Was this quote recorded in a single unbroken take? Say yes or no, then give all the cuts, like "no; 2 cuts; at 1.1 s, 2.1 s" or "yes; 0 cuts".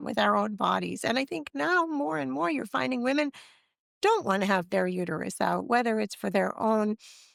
yes; 0 cuts